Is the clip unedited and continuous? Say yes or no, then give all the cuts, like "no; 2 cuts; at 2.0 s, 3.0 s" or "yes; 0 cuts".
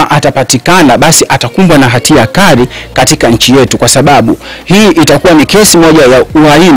yes; 0 cuts